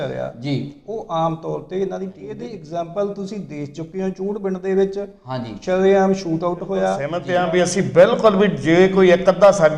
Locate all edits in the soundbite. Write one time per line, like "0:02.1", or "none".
0:02.5
0:07.1